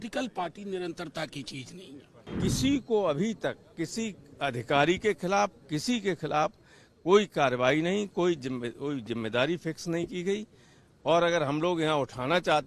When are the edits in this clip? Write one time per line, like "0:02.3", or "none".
0:02.2